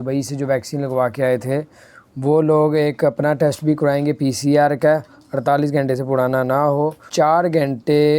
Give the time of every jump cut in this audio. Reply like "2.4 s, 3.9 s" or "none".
7.1 s